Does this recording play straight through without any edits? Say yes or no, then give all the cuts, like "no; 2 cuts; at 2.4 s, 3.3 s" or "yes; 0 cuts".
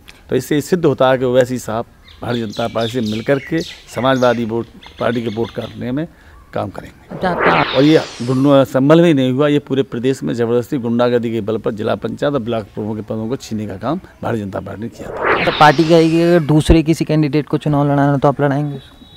no; 2 cuts; at 7.6 s, 15.4 s